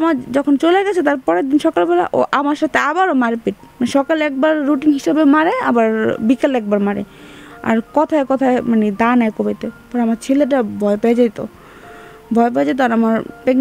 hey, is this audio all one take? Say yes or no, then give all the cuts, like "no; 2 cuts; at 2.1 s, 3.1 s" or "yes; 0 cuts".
yes; 0 cuts